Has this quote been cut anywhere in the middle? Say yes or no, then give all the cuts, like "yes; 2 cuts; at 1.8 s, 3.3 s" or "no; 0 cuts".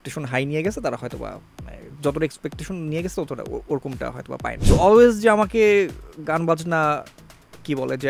yes; 1 cut; at 4.6 s